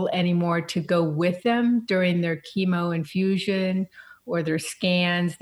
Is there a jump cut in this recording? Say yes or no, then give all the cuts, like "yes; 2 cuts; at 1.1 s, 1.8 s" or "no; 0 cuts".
no; 0 cuts